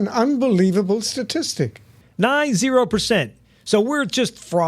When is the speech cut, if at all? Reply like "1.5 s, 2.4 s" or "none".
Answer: 2.1 s